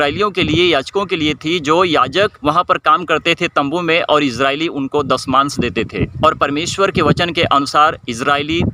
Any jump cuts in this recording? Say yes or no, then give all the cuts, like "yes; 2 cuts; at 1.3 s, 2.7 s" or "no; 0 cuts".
yes; 1 cut; at 2.4 s